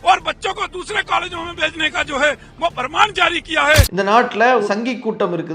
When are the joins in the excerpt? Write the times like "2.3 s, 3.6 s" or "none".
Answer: 4.6 s